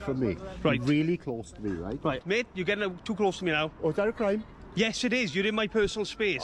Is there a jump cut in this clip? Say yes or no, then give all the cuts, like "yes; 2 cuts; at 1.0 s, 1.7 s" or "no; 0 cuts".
yes; 1 cut; at 2.2 s